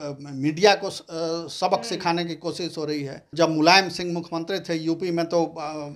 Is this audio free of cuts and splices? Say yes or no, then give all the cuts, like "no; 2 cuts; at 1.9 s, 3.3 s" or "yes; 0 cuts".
no; 1 cut; at 3.3 s